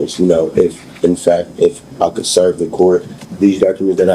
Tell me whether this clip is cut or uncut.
cut